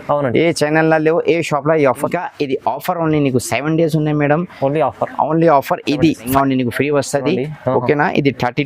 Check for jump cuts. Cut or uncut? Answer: cut